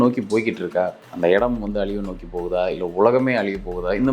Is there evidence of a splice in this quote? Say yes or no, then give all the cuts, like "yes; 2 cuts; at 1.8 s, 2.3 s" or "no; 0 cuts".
yes; 1 cut; at 1.0 s